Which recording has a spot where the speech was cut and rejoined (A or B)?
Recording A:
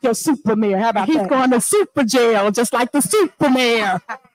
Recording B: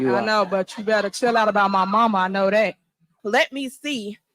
B